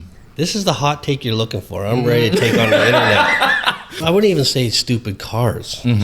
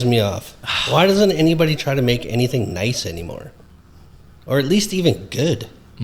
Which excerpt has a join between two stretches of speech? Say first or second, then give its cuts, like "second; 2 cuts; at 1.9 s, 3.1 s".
first; 1 cut; at 3.9 s